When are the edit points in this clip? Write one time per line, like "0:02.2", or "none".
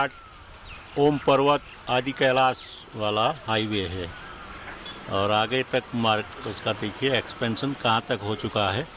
none